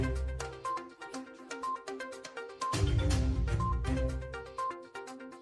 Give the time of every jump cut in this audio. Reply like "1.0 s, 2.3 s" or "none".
2.9 s, 4.5 s

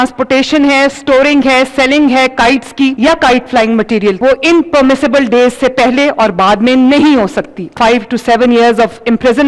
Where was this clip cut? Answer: 3.0 s, 4.2 s, 7.7 s

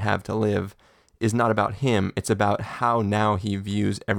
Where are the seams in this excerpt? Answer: none

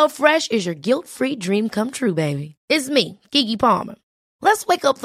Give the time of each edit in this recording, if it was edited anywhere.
none

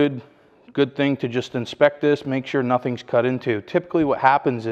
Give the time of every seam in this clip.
none

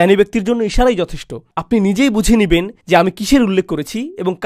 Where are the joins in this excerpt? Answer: none

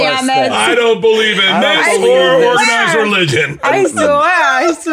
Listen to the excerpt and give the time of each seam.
none

